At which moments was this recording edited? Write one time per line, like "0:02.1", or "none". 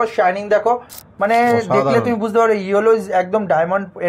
0:00.9